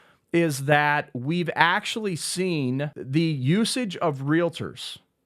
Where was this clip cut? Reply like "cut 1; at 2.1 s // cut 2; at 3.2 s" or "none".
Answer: cut 1; at 2.9 s